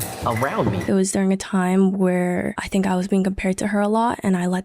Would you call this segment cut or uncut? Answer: cut